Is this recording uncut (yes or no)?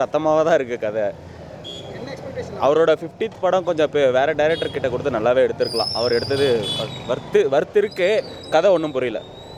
yes